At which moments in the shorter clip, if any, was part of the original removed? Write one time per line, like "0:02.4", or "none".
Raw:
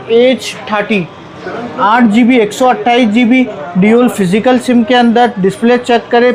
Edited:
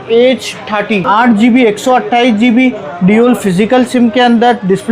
0:01.0